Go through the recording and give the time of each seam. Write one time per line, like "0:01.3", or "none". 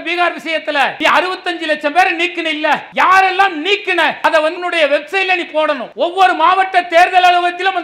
0:00.9
0:02.9
0:04.4
0:05.9